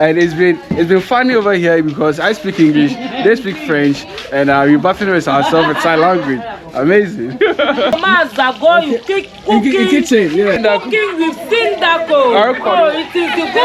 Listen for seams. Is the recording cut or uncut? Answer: cut